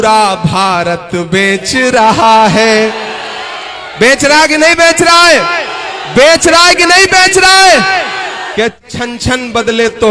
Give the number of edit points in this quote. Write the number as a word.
one